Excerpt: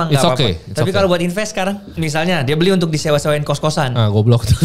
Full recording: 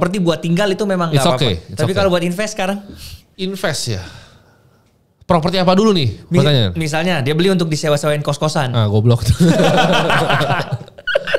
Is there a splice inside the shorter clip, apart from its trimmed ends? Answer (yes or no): yes